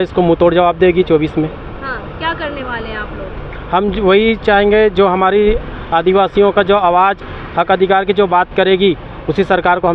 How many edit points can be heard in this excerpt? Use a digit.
0